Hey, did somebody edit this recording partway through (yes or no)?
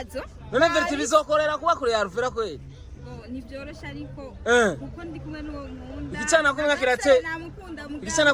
no